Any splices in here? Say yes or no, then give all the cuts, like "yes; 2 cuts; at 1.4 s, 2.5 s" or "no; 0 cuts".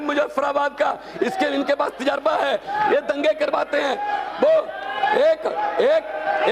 no; 0 cuts